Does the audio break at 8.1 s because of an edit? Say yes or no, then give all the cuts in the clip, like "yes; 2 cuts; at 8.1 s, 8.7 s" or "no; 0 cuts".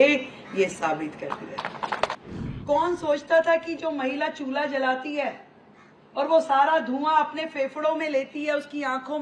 no; 1 cut; at 2.1 s